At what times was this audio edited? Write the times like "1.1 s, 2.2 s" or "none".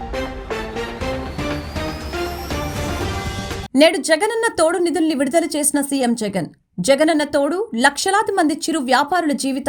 3.6 s